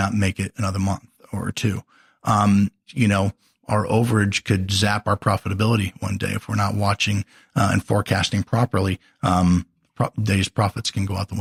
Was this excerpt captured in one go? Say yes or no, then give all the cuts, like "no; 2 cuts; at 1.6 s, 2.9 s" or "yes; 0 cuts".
yes; 0 cuts